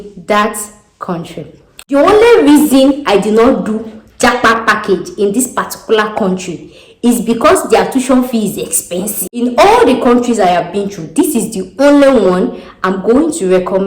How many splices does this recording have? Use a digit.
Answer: 2